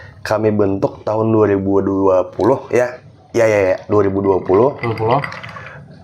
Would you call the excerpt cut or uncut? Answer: uncut